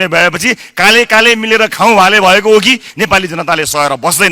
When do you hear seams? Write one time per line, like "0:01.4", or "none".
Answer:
0:02.9